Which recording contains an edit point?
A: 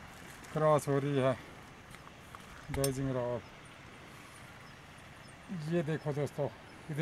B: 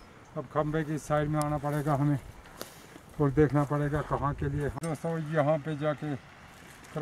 B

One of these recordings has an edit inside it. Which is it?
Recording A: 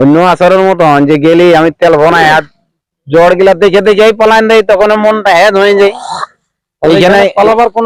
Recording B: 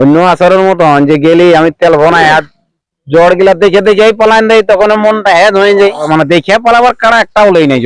B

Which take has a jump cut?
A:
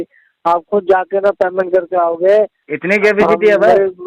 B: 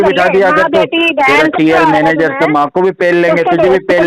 A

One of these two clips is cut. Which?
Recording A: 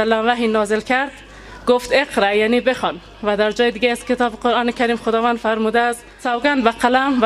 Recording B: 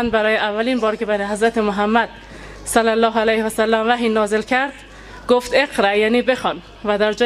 A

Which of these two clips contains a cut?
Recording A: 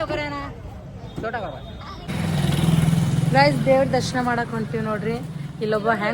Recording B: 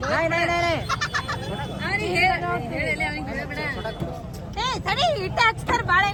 A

